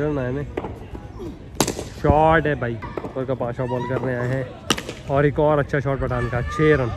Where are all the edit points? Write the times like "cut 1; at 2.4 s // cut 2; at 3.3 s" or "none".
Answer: cut 1; at 2.8 s